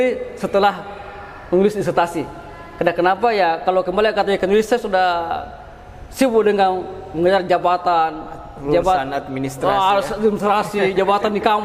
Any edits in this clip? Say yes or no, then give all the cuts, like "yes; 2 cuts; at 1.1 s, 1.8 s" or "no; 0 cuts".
no; 0 cuts